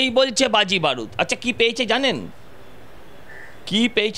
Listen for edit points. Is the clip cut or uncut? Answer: uncut